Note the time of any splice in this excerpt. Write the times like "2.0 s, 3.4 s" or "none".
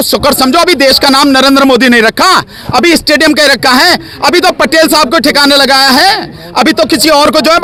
none